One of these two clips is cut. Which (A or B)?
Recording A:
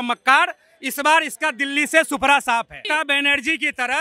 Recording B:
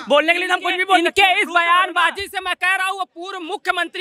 A